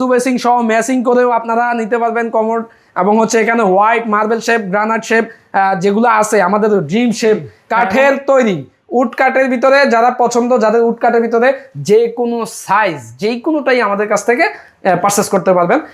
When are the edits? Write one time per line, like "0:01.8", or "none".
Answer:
0:07.6